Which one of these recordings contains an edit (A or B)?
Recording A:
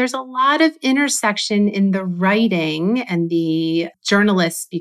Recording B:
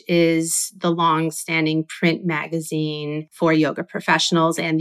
B